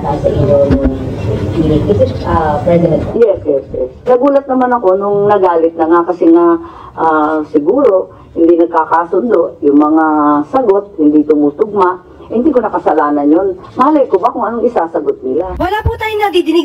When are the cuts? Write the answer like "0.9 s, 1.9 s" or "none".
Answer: 15.5 s